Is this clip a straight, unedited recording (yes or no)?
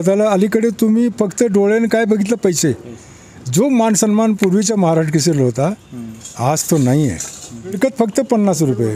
no